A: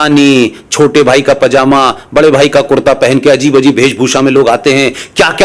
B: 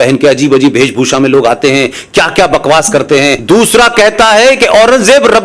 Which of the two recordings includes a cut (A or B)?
B